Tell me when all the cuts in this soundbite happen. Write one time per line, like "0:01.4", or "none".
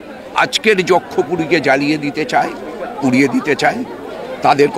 none